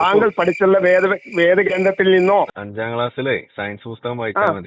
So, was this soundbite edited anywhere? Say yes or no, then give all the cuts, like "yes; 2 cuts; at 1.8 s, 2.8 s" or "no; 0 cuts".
yes; 1 cut; at 2.6 s